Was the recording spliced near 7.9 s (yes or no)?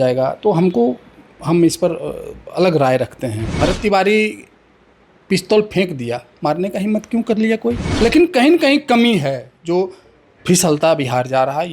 yes